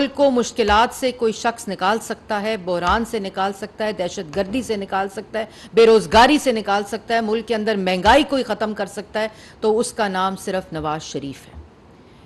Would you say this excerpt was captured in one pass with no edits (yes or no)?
yes